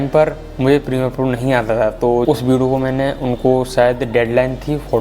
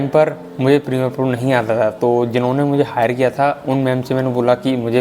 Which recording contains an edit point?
first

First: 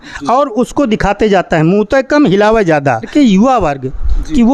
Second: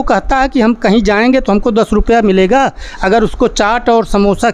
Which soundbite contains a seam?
first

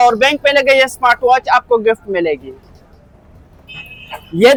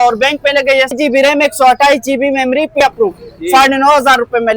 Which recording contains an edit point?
second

